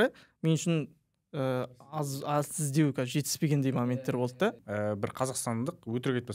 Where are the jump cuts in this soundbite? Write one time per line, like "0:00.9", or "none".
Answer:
0:04.6